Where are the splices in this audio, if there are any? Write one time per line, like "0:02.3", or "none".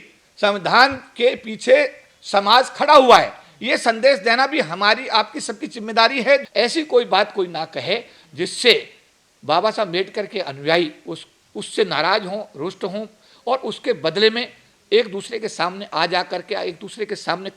0:06.4

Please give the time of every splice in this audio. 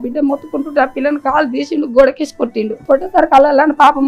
0:02.7

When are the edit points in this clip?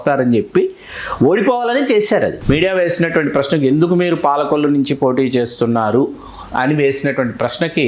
0:02.4

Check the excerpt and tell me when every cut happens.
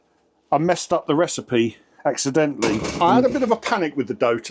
0:02.9

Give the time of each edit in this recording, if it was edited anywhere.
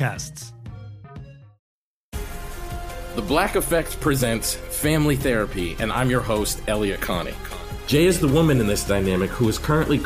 0:01.5

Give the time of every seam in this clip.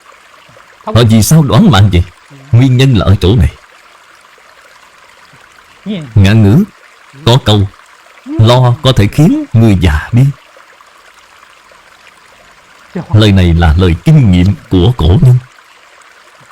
0:03.6
0:05.8

